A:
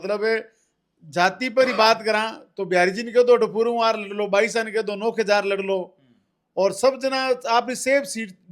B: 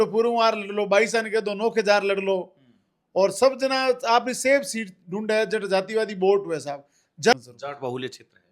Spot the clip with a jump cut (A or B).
B